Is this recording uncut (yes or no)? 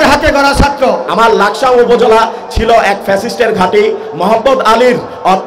no